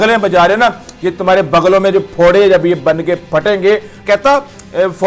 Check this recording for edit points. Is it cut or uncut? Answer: cut